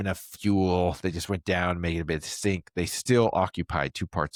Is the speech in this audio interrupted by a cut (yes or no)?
no